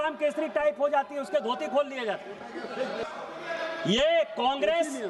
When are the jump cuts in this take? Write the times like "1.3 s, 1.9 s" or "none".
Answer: 3.0 s

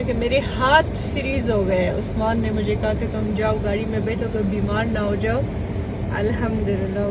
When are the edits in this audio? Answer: none

